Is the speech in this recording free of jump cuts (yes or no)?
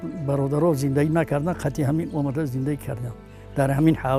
yes